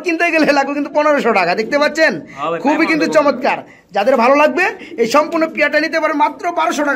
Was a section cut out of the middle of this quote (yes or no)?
no